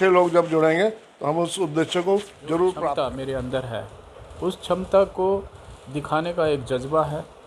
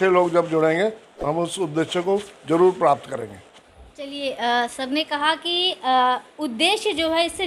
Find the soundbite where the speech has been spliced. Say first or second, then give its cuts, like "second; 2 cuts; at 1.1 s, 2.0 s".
first; 1 cut; at 2.9 s